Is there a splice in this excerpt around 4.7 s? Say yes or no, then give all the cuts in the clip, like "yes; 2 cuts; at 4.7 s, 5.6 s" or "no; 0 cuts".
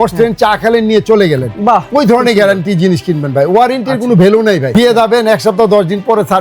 yes; 1 cut; at 4.7 s